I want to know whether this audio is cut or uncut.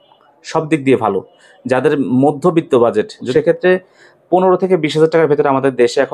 cut